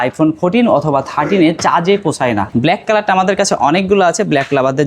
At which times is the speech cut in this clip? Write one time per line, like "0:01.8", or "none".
0:02.5